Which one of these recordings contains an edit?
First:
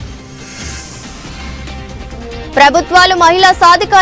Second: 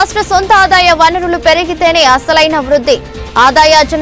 first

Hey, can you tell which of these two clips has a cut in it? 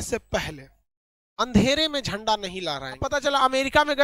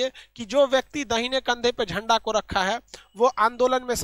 first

